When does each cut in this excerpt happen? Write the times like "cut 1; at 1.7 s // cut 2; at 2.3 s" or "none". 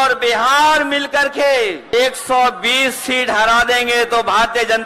cut 1; at 1.9 s